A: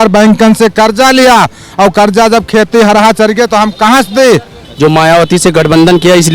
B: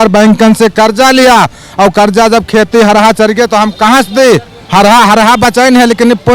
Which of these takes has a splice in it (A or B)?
A